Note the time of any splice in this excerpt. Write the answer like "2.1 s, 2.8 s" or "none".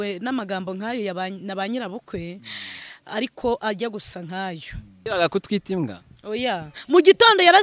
4.9 s